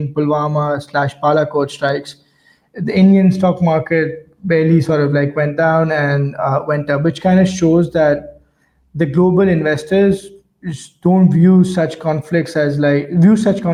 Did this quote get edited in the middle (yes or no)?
no